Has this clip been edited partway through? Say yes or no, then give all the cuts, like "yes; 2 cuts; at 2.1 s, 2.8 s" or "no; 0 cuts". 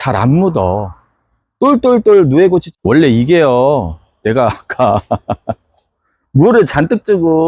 yes; 1 cut; at 2.7 s